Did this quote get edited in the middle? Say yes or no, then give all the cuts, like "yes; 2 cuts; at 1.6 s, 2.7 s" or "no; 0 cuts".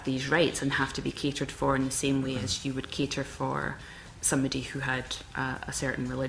no; 0 cuts